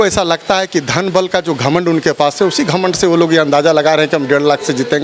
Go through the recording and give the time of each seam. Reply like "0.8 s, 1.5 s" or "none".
none